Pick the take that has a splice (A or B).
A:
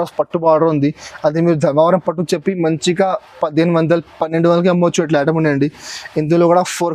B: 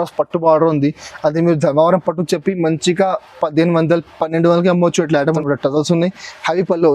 B